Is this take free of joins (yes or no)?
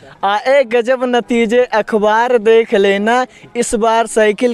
yes